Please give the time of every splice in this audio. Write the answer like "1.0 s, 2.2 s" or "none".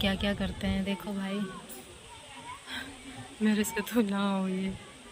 none